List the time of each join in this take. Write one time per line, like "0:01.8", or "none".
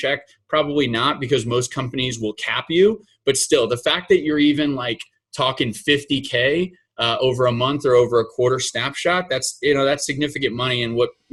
none